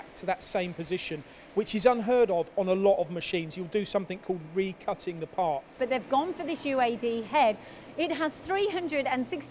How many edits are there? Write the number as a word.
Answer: two